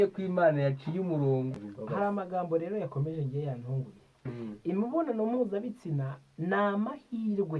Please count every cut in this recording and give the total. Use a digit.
1